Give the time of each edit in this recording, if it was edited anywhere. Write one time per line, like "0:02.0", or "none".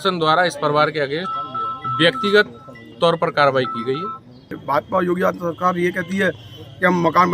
0:04.6

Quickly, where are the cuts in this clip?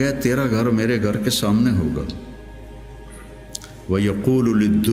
none

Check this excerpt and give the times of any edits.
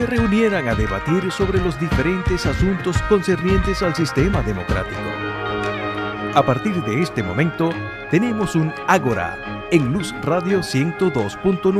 none

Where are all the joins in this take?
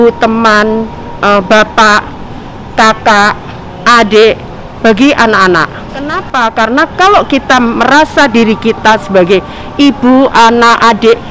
0:06.2

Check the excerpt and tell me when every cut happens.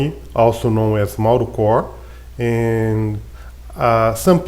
none

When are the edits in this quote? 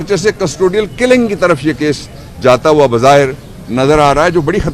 none

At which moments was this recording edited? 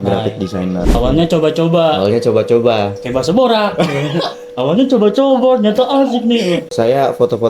0:01.0
0:06.7

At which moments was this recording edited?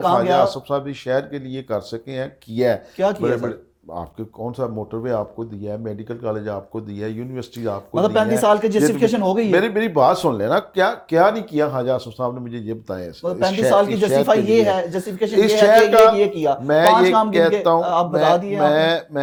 none

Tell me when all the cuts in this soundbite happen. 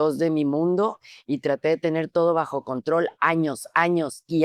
none

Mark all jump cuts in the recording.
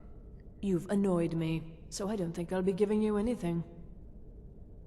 0:03.8

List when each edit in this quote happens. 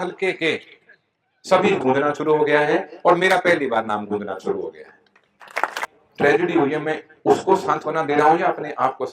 0:01.8
0:05.8

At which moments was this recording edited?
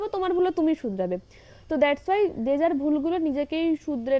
none

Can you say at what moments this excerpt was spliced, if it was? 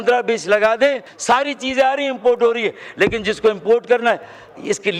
0:01.1

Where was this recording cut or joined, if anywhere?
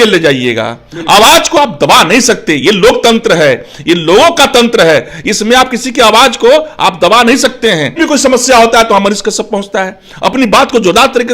0:08.0

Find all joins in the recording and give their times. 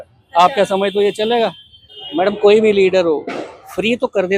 0:02.0

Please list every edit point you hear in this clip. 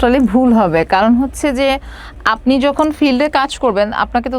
none

